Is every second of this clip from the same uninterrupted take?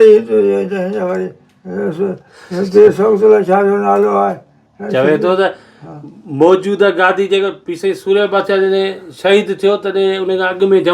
yes; 0 cuts

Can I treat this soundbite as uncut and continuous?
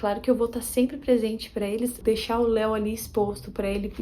no; 1 cut; at 2.0 s

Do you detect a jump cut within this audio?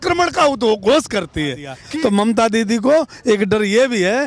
yes; 1 cut; at 1.7 s

